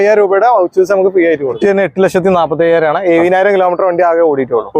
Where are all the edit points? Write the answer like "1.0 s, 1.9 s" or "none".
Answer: 1.6 s